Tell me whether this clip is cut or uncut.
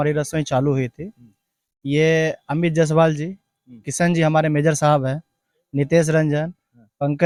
uncut